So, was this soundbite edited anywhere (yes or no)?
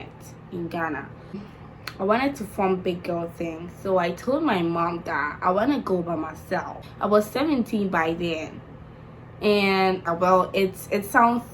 yes